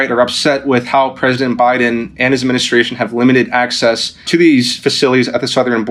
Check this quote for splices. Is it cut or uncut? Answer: uncut